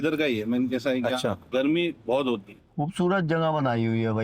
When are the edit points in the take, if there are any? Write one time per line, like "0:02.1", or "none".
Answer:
0:01.4
0:02.6